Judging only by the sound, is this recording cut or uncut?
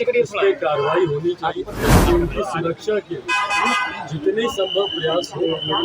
cut